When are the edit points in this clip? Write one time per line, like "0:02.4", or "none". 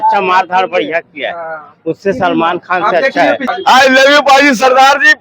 0:03.5